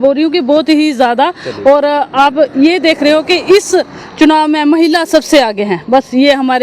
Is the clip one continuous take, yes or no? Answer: yes